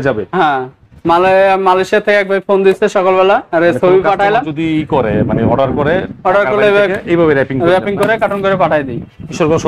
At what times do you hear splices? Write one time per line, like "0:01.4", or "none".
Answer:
none